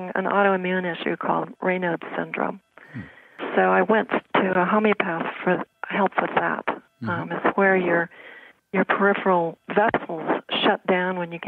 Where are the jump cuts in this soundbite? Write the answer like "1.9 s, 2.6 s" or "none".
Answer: 3.4 s